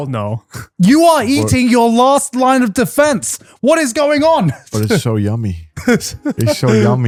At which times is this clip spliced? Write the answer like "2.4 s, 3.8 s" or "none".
none